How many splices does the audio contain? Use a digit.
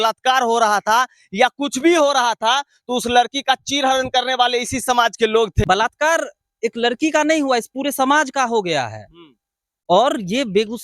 1